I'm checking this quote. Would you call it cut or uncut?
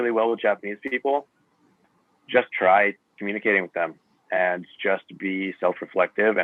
uncut